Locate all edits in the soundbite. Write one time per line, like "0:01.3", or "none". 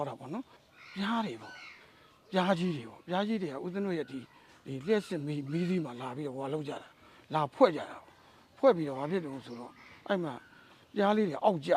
none